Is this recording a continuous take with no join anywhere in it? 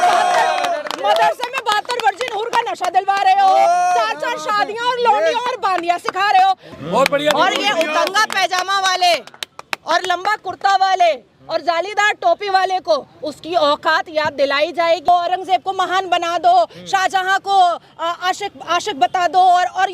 no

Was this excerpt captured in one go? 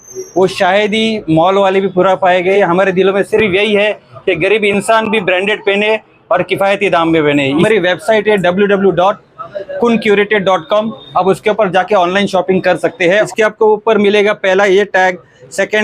no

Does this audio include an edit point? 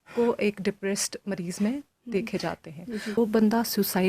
yes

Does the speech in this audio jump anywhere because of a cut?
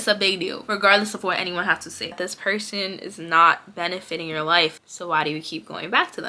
yes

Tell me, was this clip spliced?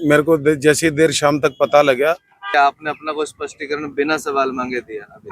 yes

